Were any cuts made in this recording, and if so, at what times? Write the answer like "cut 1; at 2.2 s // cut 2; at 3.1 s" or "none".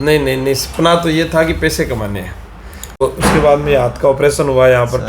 cut 1; at 3.0 s